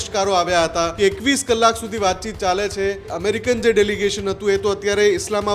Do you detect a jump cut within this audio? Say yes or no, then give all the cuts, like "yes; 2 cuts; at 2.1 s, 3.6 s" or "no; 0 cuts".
yes; 2 cuts; at 0.9 s, 3.1 s